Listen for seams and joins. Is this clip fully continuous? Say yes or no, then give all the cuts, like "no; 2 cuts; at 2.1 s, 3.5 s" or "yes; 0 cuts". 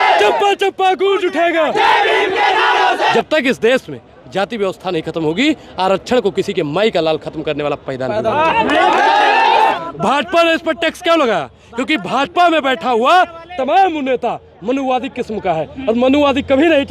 no; 2 cuts; at 3.1 s, 9.7 s